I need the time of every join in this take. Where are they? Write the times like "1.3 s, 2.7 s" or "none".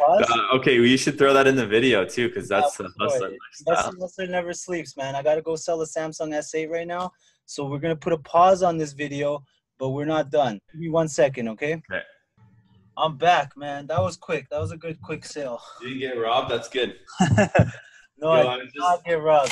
10.7 s